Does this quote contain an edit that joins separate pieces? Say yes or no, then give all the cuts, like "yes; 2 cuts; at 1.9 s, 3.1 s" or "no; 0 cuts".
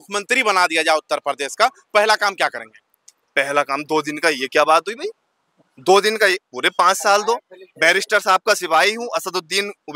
no; 0 cuts